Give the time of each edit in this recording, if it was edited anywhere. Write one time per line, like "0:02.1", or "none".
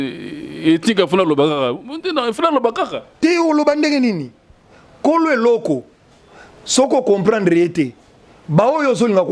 none

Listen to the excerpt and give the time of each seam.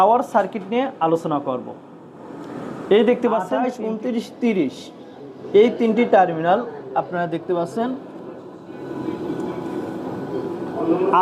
0:03.7

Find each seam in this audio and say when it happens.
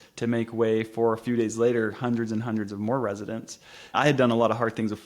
0:03.9

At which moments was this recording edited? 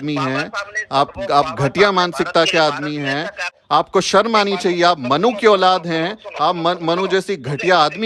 0:03.5

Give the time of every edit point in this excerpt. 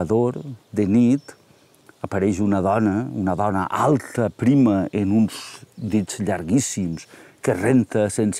none

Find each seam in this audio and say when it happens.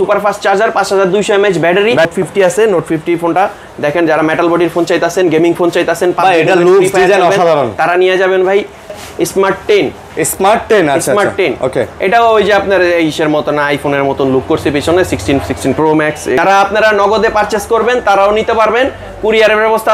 0:02.1
0:09.0
0:16.4

